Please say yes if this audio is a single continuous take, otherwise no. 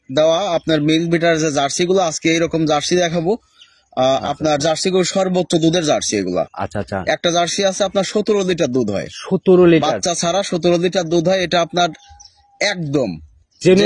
yes